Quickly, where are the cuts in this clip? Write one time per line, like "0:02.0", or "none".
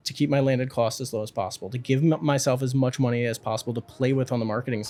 none